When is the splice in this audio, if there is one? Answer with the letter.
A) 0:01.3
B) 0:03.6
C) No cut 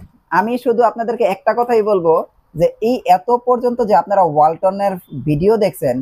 C